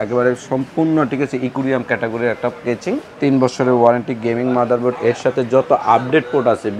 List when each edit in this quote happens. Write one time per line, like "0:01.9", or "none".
0:03.1